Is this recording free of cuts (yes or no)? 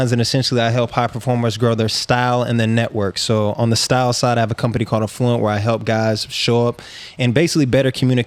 yes